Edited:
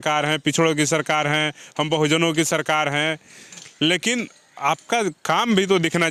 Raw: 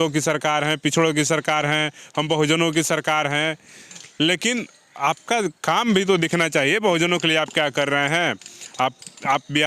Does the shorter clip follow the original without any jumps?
yes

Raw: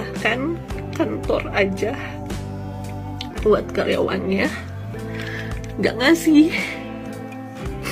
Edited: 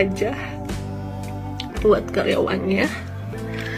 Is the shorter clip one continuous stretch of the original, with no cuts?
yes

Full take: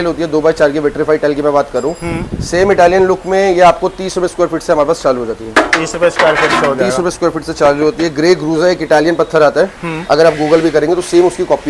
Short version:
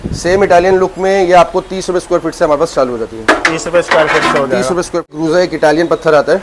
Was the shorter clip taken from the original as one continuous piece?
no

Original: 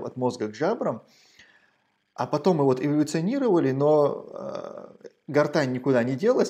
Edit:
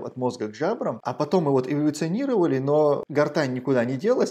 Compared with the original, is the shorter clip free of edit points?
no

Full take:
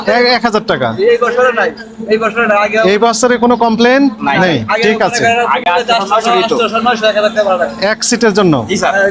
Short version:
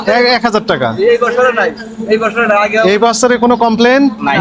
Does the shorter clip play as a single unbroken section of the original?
yes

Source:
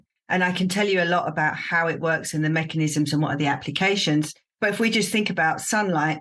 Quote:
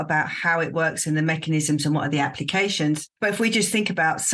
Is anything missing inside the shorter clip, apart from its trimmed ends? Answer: yes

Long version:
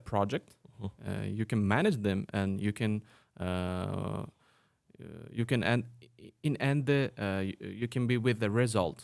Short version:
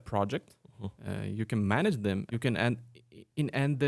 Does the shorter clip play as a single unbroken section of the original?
no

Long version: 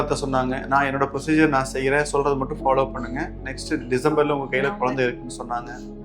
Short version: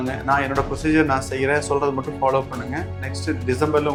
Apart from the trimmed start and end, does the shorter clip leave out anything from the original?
no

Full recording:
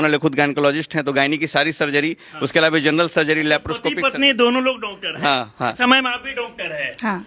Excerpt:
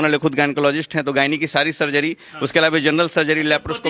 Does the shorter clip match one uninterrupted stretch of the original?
yes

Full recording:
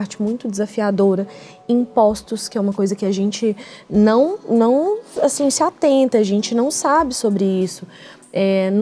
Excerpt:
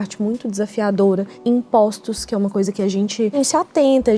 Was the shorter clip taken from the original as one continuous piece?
no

